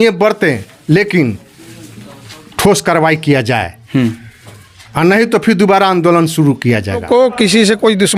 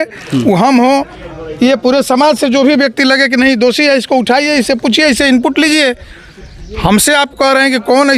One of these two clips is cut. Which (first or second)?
first